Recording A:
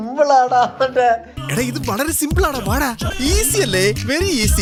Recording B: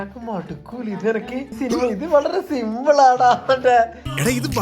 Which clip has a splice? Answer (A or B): B